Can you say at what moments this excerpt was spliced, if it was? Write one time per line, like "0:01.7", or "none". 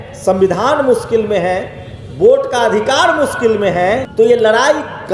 0:04.1

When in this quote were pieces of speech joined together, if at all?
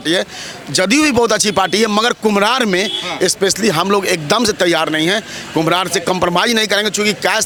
none

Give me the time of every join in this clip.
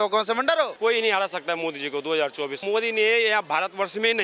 0:00.8
0:02.6

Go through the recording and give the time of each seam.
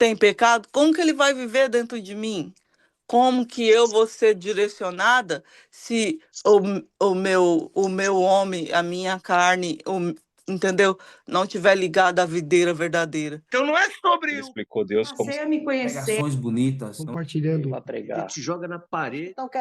0:13.4

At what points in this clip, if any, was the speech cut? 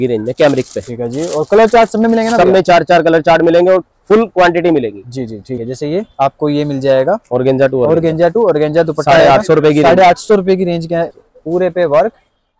0:05.6
0:11.1

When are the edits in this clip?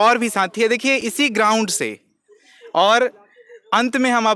none

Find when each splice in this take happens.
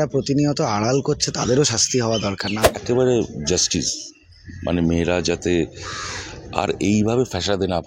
0:02.5

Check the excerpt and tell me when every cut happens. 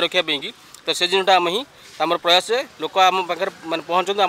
none

